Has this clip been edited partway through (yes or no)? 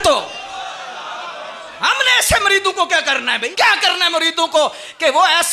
yes